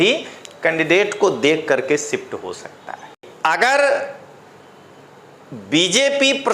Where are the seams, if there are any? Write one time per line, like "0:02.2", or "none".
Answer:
0:03.3